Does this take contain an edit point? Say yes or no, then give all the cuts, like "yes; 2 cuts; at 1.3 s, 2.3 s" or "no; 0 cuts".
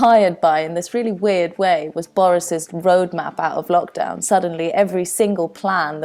no; 0 cuts